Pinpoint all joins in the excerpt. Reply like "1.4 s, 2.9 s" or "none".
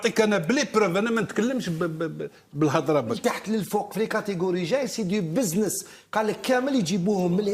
3.2 s